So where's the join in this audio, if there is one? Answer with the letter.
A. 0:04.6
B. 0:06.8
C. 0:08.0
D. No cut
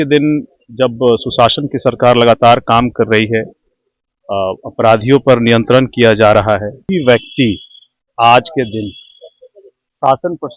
B